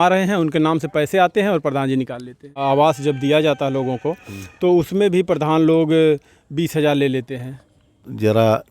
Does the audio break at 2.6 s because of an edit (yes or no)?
yes